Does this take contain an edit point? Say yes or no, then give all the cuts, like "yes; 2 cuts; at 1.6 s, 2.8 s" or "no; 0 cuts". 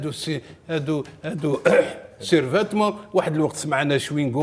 no; 0 cuts